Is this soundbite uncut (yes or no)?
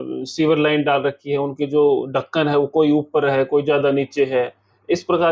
yes